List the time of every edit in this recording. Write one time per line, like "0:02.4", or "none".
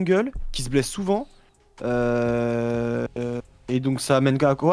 none